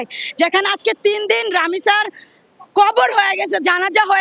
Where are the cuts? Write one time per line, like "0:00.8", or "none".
none